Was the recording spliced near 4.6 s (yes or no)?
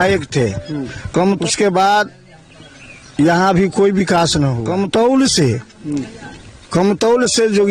yes